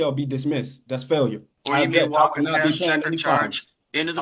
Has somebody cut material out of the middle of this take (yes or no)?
yes